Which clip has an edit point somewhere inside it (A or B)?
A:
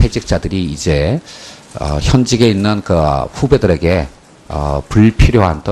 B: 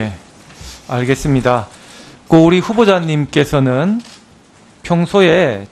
A